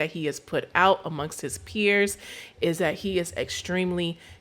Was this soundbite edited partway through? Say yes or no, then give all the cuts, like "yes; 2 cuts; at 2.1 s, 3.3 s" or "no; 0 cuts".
no; 0 cuts